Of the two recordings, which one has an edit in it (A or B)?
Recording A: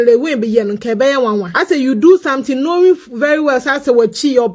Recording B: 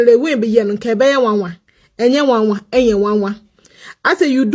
A